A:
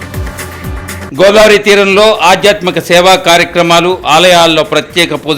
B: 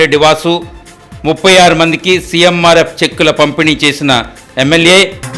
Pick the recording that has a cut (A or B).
A